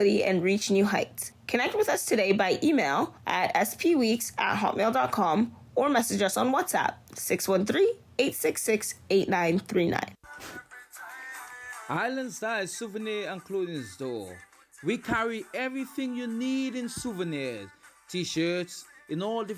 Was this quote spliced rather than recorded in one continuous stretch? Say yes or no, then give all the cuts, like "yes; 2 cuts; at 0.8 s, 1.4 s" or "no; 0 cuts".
yes; 1 cut; at 9.9 s